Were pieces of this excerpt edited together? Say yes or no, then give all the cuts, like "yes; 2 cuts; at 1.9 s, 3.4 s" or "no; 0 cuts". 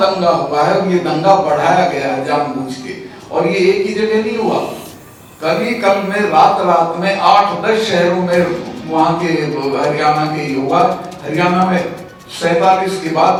no; 0 cuts